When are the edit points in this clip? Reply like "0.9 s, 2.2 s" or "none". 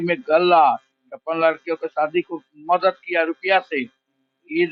none